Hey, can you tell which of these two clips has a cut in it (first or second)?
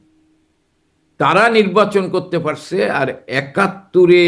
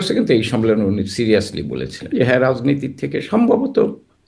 second